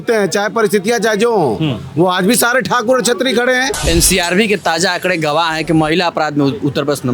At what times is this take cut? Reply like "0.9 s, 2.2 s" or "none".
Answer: 3.8 s